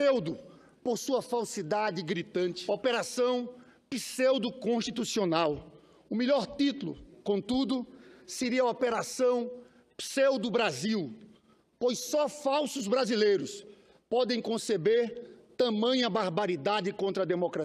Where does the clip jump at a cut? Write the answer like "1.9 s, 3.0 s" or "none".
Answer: none

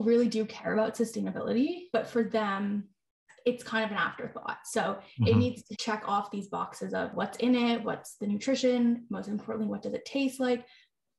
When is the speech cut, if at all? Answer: 1.8 s, 5.7 s, 7.1 s, 7.9 s

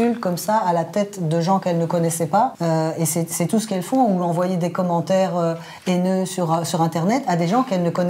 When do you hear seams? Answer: 2.6 s

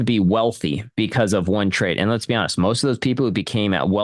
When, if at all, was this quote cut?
none

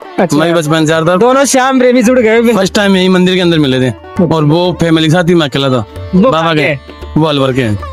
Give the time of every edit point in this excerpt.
none

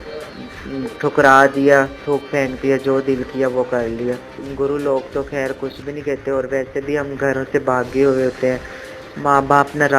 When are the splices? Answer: 4.4 s

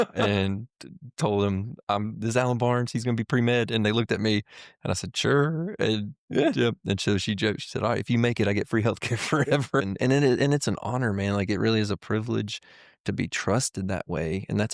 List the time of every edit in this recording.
9.9 s

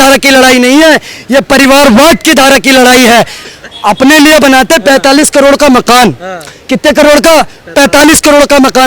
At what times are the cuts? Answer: 3.4 s

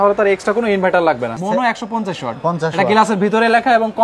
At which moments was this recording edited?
1.3 s

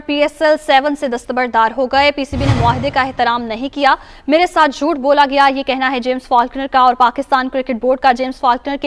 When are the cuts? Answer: none

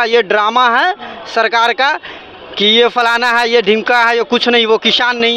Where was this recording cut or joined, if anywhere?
none

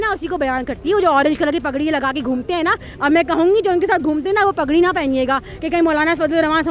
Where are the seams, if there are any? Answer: none

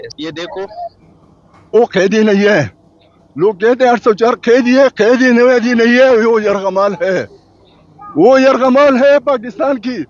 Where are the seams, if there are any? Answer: 1.8 s

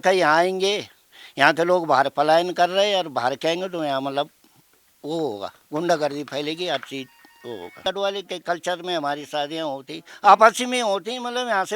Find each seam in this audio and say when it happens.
7.8 s

